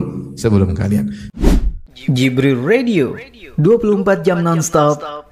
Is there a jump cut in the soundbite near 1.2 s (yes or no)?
yes